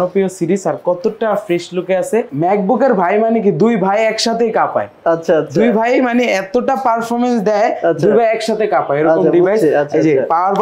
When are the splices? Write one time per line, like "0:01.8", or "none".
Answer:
0:02.3